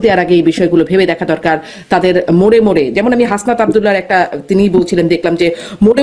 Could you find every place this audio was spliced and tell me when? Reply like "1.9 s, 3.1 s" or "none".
none